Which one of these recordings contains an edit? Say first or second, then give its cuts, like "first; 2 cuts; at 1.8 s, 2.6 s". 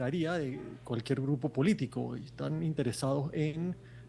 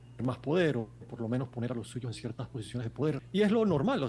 second; 2 cuts; at 1.0 s, 3.2 s